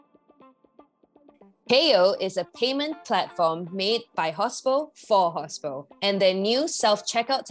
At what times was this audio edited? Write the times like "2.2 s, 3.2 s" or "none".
1.7 s